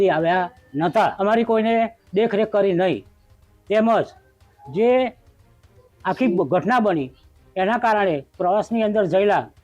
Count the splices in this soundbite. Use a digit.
1